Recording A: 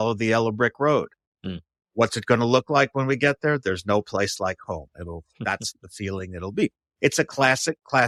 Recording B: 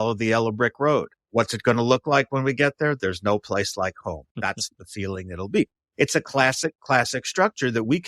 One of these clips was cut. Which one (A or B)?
B